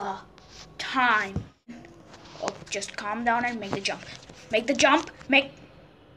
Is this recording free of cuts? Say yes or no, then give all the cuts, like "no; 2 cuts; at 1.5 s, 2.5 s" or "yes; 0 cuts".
no; 1 cut; at 1.7 s